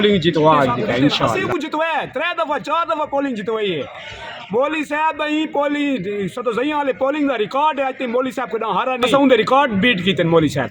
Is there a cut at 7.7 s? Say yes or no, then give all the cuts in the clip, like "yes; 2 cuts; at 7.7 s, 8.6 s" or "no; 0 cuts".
no; 2 cuts; at 1.4 s, 9.1 s